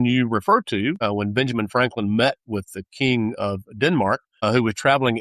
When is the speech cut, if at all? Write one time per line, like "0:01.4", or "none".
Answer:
0:01.0
0:04.3